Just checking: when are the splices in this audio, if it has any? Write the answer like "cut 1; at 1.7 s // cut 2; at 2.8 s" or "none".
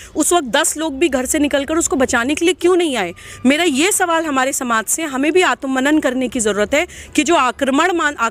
none